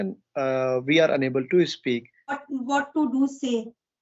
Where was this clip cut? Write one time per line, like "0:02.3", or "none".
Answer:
0:02.4